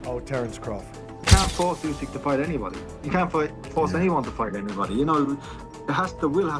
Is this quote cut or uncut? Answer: cut